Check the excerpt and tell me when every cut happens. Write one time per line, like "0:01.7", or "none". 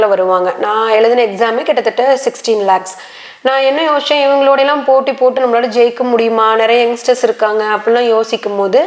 none